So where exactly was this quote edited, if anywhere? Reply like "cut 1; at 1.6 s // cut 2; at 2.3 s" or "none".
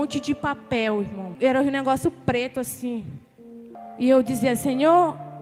cut 1; at 1.3 s // cut 2; at 3.8 s

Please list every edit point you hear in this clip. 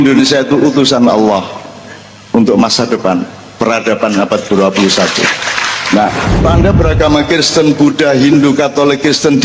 cut 1; at 6.4 s

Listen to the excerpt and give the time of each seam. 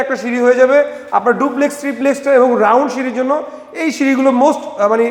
none

